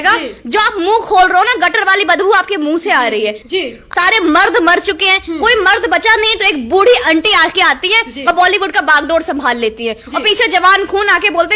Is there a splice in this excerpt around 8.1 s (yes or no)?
no